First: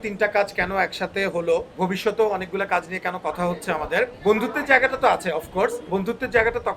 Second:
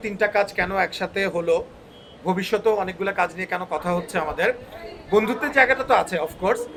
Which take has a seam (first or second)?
first